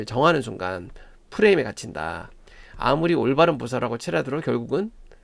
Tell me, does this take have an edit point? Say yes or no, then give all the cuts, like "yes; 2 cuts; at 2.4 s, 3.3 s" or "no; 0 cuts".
no; 0 cuts